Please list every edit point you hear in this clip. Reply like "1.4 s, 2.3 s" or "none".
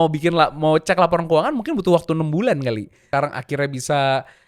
3.0 s